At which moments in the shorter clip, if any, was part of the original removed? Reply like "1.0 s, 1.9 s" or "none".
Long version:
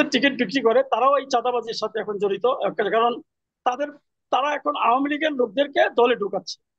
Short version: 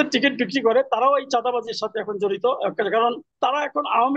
3.3 s